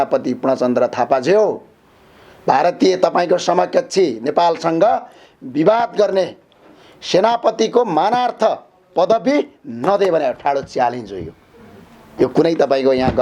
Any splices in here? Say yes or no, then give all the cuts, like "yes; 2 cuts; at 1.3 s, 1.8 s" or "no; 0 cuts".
no; 0 cuts